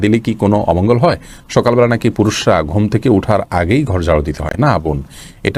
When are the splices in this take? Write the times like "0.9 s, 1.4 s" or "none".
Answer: none